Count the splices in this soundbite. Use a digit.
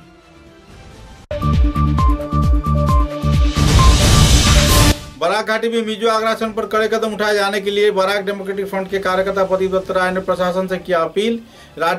1